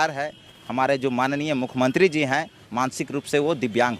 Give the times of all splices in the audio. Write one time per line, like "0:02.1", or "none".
0:02.6